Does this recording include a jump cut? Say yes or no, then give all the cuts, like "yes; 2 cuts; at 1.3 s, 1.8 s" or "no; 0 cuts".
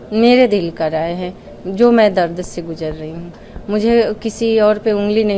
no; 0 cuts